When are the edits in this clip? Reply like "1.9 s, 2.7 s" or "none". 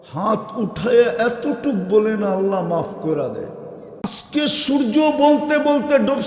4.2 s